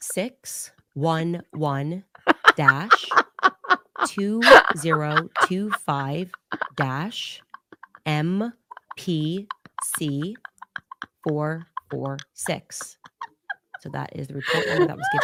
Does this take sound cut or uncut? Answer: uncut